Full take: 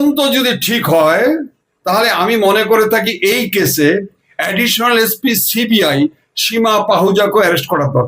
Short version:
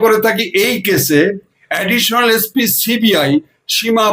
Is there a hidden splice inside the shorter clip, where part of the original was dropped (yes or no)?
no